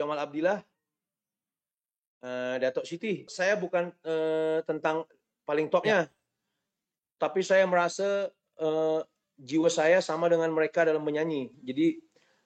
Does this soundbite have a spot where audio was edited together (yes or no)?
yes